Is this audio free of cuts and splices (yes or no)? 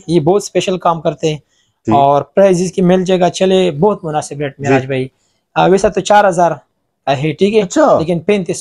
yes